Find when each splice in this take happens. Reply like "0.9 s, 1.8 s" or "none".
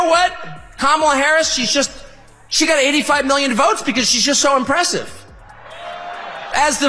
5.3 s